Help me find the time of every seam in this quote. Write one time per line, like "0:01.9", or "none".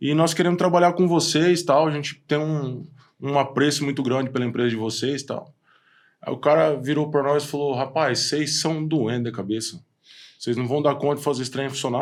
none